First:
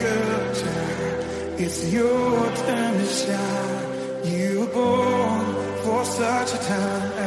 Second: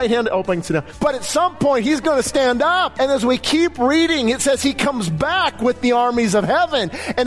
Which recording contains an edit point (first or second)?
second